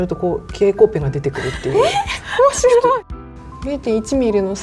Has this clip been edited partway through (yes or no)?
yes